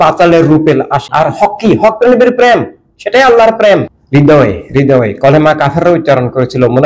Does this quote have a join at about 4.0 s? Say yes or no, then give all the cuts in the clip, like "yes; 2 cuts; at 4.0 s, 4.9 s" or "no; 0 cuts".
yes; 2 cuts; at 1.0 s, 4.0 s